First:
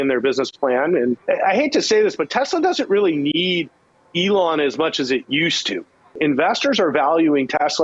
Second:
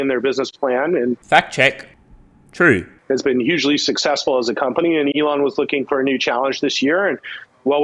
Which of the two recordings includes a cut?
first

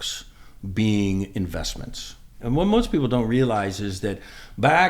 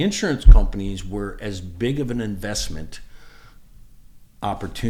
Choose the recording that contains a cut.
first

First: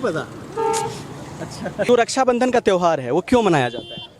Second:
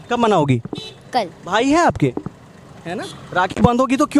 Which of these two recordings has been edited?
first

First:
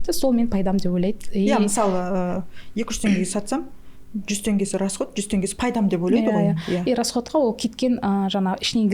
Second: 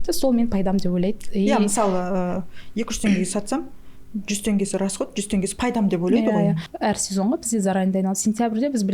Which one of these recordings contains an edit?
second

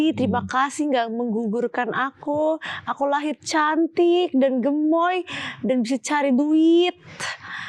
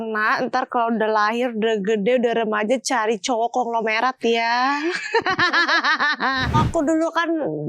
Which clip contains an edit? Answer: second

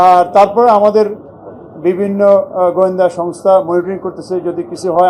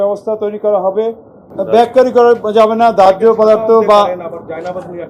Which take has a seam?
second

